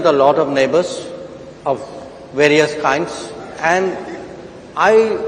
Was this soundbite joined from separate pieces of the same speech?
yes; 1 cut; at 3.4 s

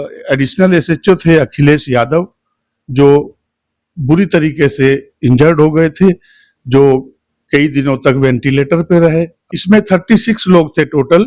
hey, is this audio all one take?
no; 1 cut; at 9.4 s

